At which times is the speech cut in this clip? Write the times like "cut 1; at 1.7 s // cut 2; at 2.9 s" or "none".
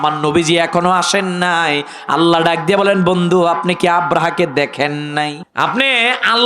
cut 1; at 5.4 s